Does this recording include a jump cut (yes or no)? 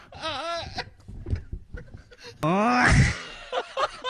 no